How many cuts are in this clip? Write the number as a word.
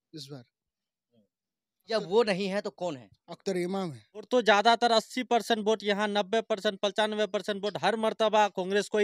two